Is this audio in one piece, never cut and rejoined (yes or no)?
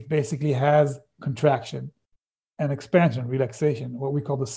yes